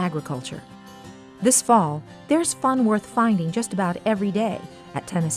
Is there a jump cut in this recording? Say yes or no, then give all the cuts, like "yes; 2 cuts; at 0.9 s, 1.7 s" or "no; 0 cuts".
no; 0 cuts